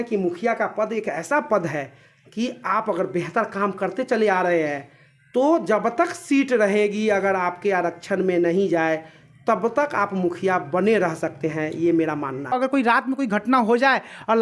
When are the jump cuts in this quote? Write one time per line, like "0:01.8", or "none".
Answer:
0:12.5